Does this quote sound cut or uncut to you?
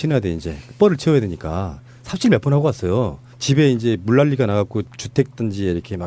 cut